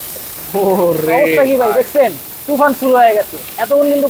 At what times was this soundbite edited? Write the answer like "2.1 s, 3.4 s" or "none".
none